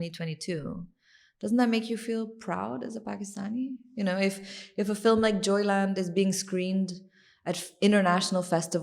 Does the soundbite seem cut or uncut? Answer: uncut